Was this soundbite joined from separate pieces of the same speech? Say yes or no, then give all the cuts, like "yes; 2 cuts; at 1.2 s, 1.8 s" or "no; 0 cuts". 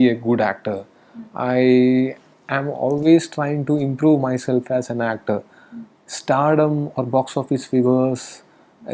no; 0 cuts